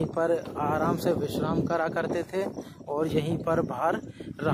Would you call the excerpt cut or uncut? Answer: uncut